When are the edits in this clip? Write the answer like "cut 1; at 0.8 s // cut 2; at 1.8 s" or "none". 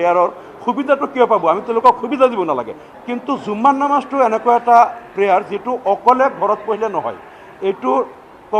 cut 1; at 2.8 s